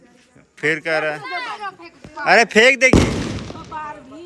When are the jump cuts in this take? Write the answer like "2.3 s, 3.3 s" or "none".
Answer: none